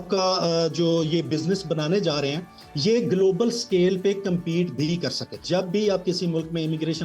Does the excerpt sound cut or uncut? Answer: cut